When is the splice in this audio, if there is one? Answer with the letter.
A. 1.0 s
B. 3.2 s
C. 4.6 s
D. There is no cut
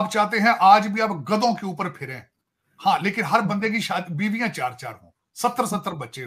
D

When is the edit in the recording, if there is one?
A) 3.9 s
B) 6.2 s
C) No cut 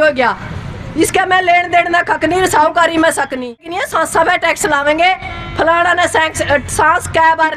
A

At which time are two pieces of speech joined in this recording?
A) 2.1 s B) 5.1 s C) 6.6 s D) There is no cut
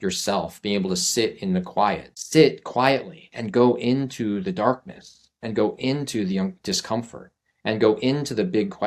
A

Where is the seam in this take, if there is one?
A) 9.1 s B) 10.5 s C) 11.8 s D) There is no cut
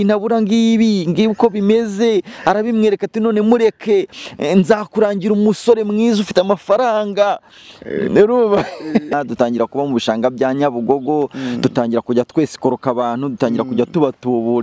A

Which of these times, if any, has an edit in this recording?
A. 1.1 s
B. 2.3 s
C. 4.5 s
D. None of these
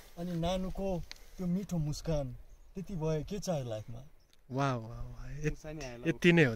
D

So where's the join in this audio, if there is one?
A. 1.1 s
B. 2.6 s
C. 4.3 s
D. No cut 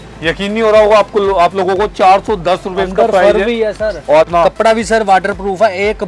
C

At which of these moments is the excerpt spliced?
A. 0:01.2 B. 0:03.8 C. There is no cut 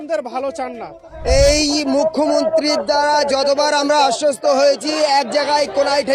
A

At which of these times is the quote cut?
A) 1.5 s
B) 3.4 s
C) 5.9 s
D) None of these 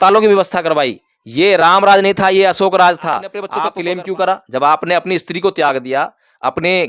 B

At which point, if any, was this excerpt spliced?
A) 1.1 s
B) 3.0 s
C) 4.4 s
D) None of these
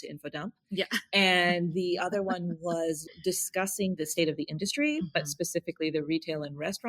B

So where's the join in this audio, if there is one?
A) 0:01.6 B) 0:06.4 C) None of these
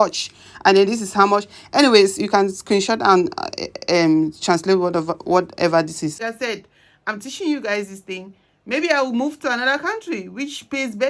B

